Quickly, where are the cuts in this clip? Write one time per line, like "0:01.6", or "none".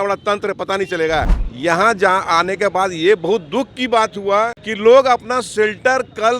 0:01.4
0:04.6